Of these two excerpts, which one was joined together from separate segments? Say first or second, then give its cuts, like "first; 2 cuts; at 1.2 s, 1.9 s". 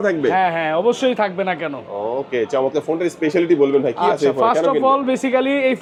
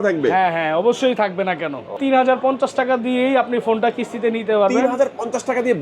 second; 1 cut; at 2.0 s